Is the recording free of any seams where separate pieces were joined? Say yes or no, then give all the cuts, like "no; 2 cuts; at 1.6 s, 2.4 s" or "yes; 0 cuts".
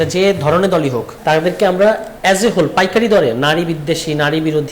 no; 2 cuts; at 1.1 s, 2.1 s